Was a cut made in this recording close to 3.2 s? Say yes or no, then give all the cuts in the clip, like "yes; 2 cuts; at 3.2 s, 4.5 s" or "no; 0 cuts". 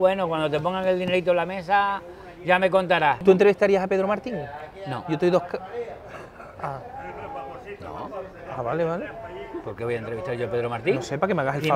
yes; 1 cut; at 3.2 s